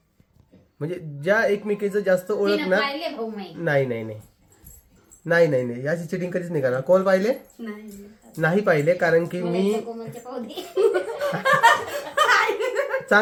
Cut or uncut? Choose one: uncut